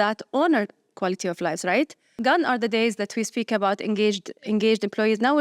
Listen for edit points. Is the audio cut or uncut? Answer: cut